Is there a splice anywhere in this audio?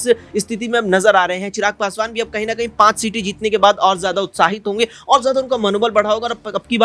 no; 0 cuts

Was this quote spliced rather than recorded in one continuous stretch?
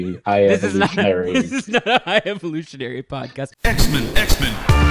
yes; 1 cut; at 3.5 s

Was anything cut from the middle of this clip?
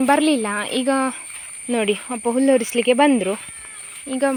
no; 0 cuts

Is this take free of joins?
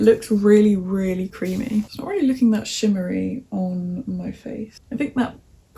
no; 2 cuts; at 1.9 s, 4.8 s

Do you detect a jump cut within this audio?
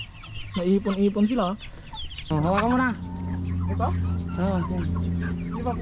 yes; 1 cut; at 2.2 s

